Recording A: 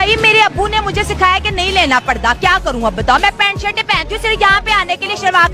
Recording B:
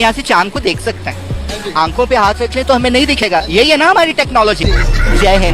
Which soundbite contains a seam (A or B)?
B